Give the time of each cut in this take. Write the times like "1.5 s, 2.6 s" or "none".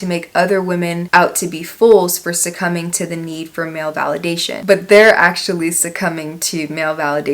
4.6 s